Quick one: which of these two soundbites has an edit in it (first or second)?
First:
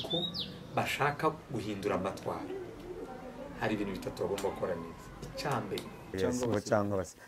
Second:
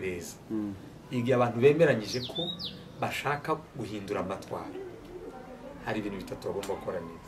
first